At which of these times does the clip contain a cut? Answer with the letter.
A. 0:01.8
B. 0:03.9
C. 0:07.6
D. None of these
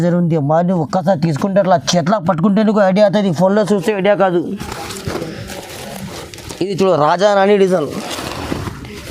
D